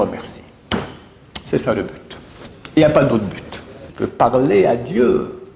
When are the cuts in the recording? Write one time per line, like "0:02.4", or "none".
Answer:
0:04.0